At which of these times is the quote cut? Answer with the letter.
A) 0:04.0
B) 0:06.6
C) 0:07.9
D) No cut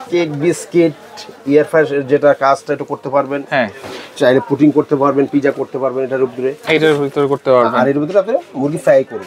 D